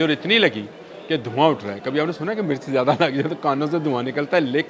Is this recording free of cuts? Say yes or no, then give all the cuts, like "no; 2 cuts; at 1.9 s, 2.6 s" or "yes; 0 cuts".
yes; 0 cuts